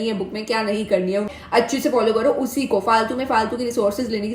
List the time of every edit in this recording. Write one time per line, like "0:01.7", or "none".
0:01.3